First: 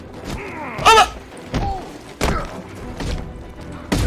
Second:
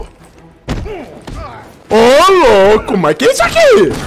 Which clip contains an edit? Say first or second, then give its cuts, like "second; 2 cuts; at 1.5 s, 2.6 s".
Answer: first; 1 cut; at 3.1 s